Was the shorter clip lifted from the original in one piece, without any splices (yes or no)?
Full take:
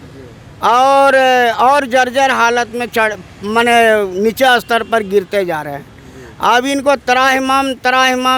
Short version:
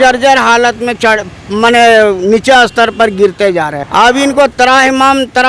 no